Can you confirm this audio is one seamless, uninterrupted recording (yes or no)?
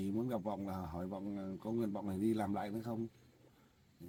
yes